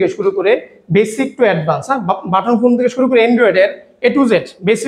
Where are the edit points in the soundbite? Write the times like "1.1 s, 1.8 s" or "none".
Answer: none